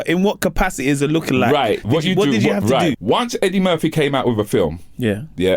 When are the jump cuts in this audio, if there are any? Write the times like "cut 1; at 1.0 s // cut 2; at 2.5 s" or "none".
cut 1; at 2.9 s